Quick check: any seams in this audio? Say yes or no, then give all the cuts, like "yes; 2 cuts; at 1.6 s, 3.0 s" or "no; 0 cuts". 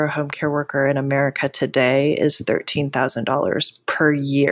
no; 0 cuts